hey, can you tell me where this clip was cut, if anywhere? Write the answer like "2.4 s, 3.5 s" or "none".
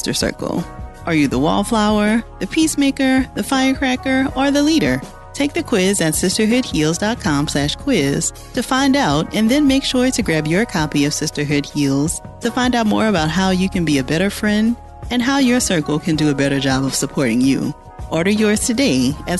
none